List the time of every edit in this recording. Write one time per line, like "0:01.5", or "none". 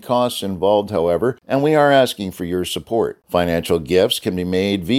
0:01.4